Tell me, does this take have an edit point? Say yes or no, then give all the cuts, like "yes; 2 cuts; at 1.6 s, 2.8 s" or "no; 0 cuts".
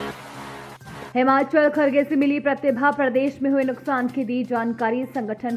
yes; 1 cut; at 0.9 s